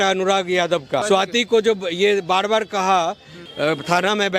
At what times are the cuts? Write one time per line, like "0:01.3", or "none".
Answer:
0:01.0
0:03.4